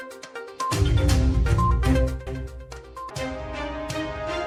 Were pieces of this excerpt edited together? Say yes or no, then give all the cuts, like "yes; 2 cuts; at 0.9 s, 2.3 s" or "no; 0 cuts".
no; 0 cuts